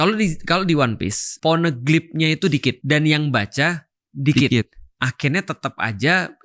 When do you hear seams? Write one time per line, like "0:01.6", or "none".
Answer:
0:01.2
0:02.8